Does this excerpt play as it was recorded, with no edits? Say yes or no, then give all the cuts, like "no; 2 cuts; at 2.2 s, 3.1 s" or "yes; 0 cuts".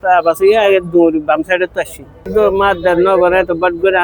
no; 1 cut; at 2.2 s